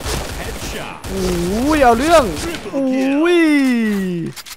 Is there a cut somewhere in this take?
no; 0 cuts

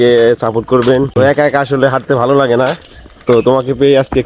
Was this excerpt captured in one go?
no; 1 cut; at 1.1 s

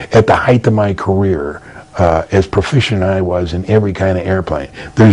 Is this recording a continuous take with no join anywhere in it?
yes; 0 cuts

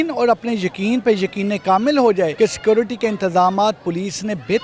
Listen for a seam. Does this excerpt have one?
yes; 1 cut; at 2.3 s

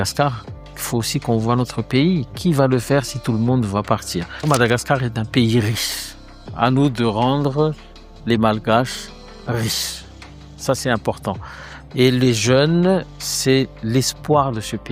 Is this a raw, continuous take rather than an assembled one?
yes; 0 cuts

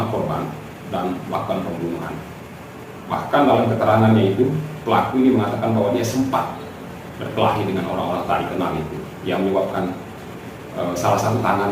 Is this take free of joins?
yes; 0 cuts

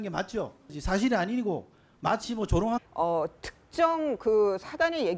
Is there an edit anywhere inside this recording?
no; 0 cuts

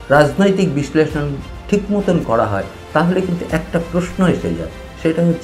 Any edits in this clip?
no; 0 cuts

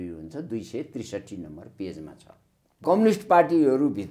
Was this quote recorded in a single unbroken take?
no; 1 cut; at 2.8 s

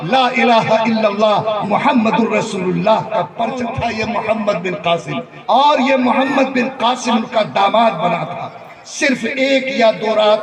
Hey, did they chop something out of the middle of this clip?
yes; 2 cuts; at 3.7 s, 5.2 s

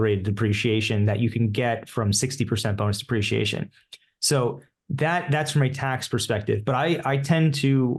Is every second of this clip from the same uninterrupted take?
yes; 0 cuts

